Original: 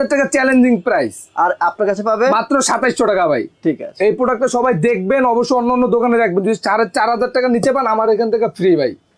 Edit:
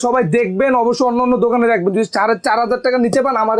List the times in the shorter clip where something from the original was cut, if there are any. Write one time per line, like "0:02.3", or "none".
none

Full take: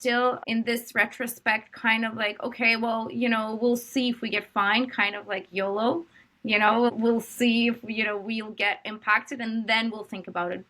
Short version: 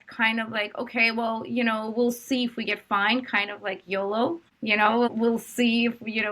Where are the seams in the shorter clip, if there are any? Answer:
0:04.5

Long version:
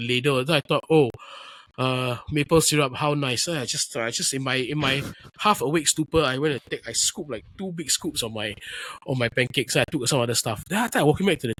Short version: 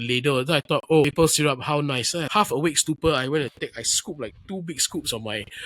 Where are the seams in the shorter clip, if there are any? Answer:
0:01.1
0:02.3

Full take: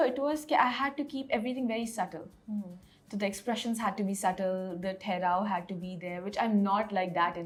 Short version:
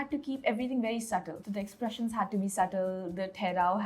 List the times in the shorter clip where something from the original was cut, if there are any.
0:01.4

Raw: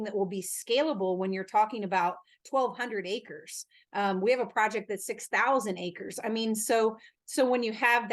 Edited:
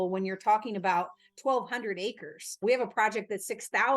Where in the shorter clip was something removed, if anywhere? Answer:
0:02.6

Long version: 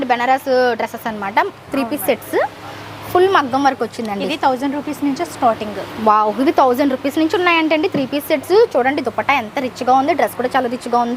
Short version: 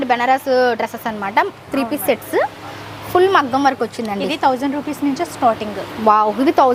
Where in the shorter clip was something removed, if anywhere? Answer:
none

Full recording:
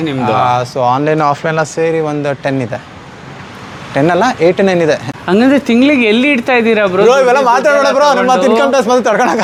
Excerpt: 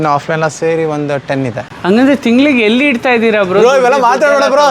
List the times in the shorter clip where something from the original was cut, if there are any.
0:01.7

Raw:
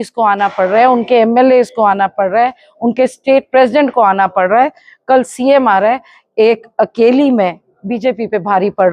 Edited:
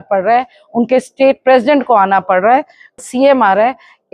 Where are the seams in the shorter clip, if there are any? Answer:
0:03.0

